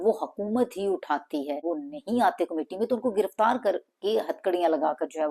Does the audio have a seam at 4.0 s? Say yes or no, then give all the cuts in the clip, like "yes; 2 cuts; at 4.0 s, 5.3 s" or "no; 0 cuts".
no; 1 cut; at 1.4 s